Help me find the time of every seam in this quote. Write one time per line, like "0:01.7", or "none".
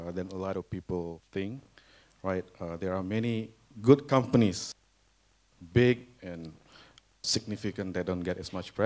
0:01.2